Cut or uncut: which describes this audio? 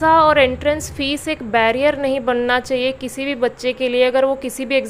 uncut